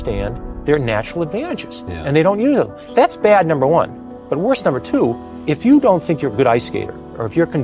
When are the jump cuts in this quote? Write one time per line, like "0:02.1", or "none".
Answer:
0:02.8
0:05.3